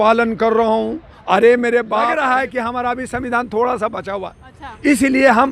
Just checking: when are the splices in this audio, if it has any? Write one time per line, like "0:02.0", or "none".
0:02.1